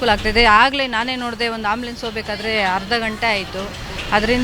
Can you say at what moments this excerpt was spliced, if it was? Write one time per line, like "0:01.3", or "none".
none